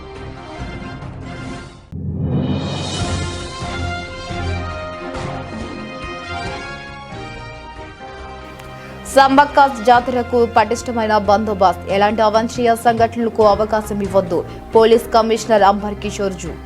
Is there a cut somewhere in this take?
yes; 1 cut; at 7.9 s

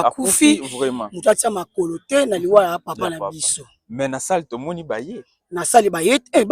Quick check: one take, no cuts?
yes; 0 cuts

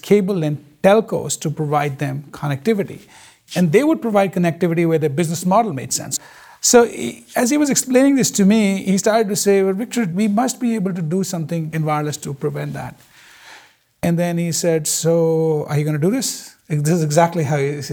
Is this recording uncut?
yes; 0 cuts

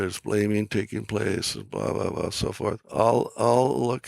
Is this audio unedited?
no; 1 cut; at 2.8 s

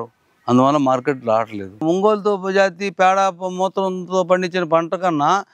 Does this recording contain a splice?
yes; 1 cut; at 1.8 s

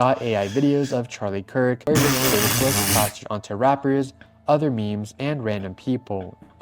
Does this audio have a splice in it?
yes; 1 cut; at 1.8 s

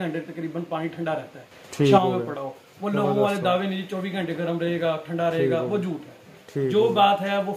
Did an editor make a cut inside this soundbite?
no; 0 cuts

